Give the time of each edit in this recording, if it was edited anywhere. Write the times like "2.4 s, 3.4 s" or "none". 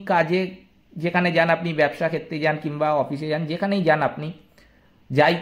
none